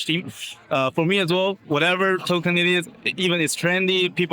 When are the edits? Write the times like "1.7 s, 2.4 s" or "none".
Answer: 1.6 s